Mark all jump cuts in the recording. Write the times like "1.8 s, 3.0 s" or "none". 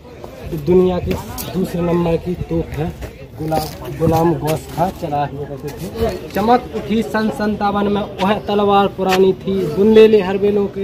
6.0 s